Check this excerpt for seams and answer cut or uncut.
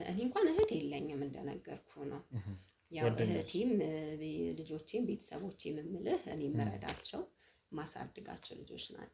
uncut